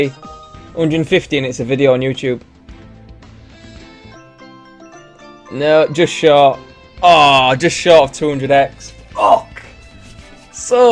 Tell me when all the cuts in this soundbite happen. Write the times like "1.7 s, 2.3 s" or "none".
3.1 s

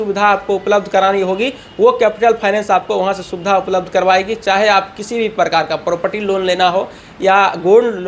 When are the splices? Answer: none

